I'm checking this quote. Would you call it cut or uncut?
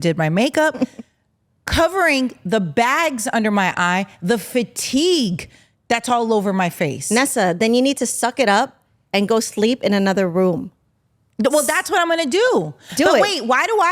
uncut